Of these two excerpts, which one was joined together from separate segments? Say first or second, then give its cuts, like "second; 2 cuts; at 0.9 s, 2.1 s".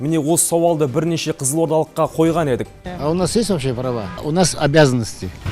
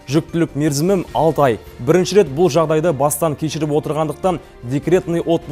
first; 1 cut; at 2.8 s